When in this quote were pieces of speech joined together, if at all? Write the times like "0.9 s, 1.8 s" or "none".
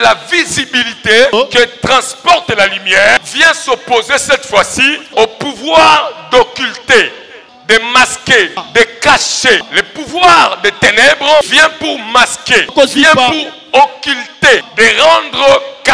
1.3 s, 3.3 s, 5.1 s, 7.5 s, 8.6 s, 9.7 s, 11.5 s, 12.7 s, 14.7 s